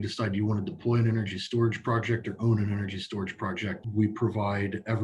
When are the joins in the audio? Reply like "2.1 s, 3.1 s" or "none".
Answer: 3.8 s